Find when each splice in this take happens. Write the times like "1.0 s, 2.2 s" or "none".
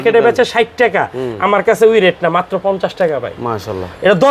none